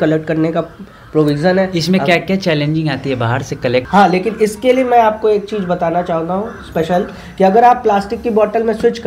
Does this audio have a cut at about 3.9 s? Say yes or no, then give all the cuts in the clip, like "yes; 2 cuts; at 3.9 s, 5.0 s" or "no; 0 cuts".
yes; 1 cut; at 3.9 s